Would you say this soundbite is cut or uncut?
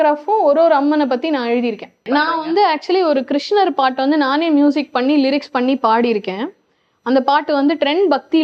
cut